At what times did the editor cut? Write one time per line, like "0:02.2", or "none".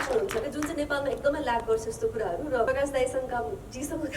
0:02.7